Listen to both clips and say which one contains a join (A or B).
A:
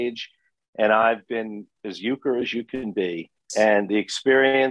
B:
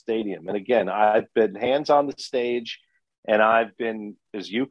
A